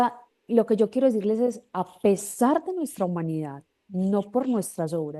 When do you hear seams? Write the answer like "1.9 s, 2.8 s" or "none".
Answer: none